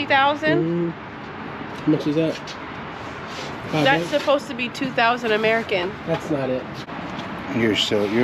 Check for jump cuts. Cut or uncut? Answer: cut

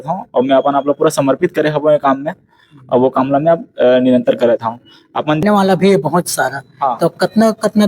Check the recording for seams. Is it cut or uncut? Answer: cut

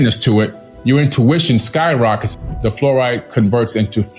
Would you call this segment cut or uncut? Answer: cut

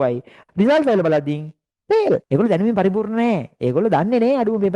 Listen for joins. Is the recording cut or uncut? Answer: cut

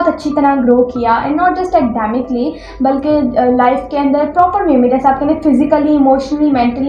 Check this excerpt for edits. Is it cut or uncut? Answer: uncut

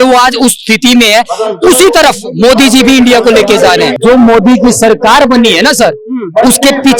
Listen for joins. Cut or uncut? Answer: cut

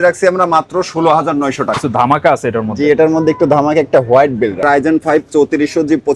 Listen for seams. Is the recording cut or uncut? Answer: cut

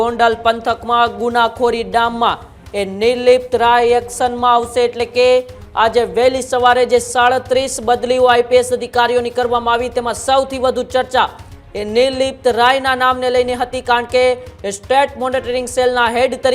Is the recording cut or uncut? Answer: uncut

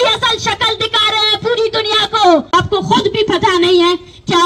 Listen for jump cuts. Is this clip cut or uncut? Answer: cut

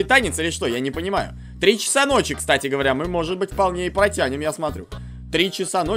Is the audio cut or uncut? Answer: uncut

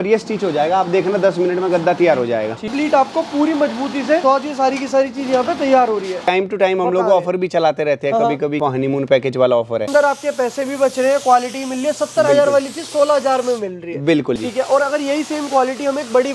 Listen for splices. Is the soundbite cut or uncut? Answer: cut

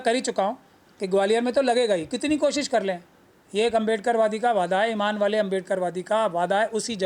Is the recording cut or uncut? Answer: uncut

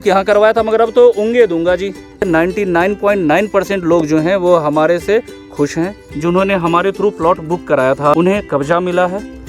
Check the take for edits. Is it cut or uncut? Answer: cut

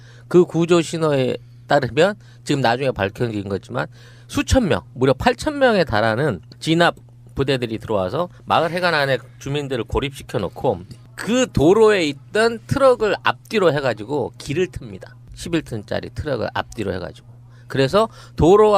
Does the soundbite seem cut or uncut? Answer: uncut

